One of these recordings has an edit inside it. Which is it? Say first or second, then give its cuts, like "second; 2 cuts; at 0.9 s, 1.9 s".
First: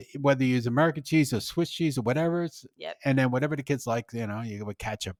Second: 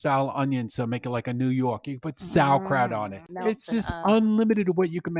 second; 1 cut; at 3.3 s